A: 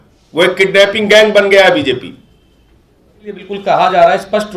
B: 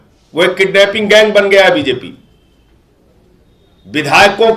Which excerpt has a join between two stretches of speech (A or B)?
A